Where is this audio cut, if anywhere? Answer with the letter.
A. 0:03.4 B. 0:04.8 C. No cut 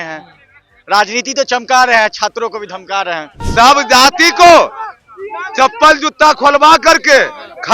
A